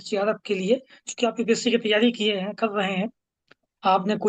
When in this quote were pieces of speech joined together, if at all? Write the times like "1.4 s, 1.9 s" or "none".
none